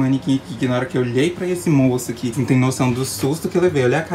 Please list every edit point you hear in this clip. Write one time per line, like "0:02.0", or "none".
0:02.3